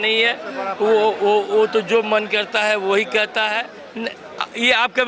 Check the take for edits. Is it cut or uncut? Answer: cut